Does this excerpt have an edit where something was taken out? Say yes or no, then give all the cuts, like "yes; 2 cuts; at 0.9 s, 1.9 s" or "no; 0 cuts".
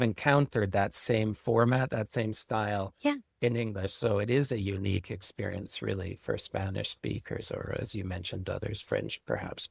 no; 0 cuts